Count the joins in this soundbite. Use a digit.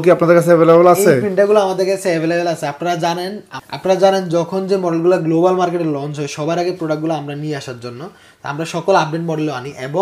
0